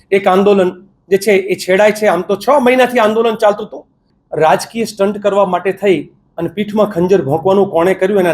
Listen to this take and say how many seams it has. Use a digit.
1